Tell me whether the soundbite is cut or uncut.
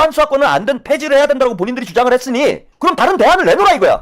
cut